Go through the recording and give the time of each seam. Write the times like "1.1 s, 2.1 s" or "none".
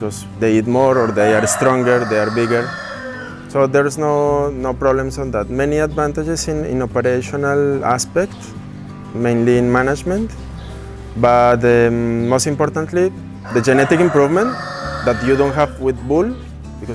none